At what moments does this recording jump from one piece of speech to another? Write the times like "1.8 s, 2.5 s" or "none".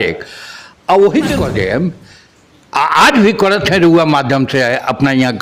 1.4 s